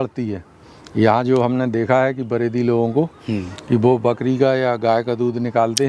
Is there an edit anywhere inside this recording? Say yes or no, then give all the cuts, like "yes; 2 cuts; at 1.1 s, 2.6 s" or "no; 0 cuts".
no; 0 cuts